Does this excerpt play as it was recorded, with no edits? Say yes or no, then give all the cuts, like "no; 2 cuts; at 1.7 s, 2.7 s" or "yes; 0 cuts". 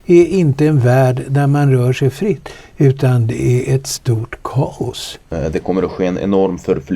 no; 1 cut; at 5.3 s